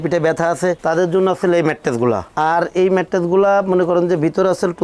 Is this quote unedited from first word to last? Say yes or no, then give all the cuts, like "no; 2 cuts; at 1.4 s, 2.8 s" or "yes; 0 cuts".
yes; 0 cuts